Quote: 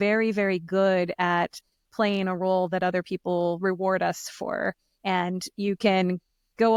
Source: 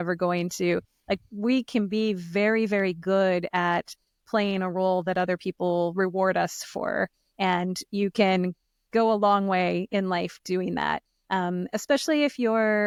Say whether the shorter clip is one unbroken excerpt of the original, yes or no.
yes